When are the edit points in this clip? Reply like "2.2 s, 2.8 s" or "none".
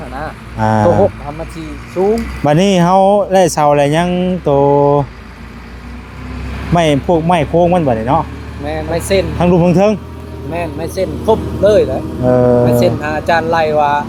none